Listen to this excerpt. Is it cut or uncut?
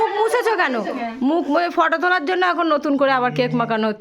uncut